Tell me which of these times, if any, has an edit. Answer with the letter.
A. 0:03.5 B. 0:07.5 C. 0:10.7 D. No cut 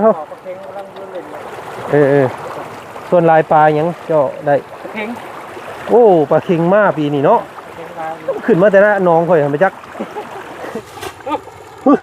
C